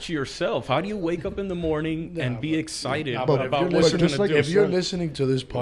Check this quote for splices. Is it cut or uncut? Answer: uncut